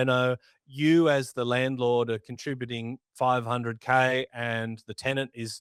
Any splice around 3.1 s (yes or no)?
no